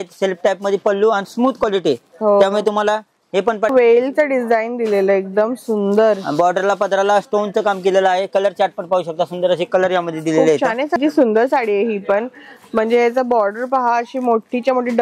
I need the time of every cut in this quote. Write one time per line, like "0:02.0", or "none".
0:03.7
0:11.0